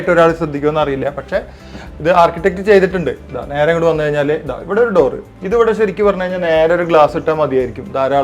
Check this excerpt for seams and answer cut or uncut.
uncut